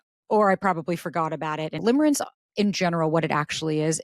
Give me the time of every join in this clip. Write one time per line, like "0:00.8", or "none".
0:01.8